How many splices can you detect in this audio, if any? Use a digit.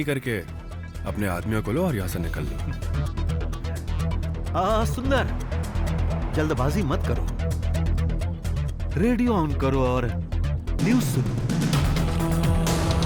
0